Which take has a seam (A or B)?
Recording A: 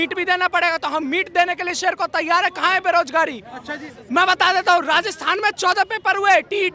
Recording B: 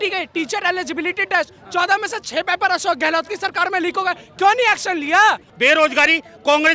B